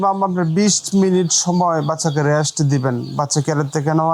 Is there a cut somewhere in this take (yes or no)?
no